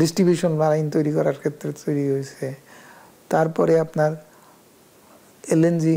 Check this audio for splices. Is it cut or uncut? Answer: uncut